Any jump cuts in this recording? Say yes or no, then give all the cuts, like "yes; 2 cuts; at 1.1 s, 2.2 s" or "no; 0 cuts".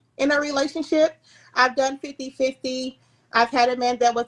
no; 0 cuts